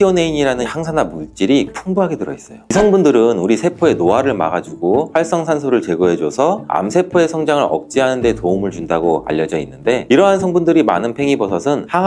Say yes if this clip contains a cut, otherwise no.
yes